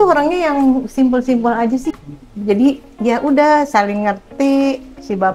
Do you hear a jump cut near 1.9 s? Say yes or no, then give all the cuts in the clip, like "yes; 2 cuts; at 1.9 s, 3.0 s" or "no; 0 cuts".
yes; 1 cut; at 1.9 s